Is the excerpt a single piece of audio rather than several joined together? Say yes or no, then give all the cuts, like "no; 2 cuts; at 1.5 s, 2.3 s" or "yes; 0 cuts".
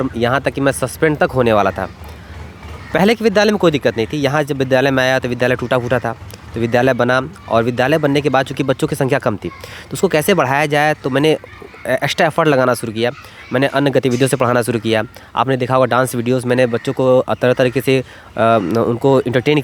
yes; 0 cuts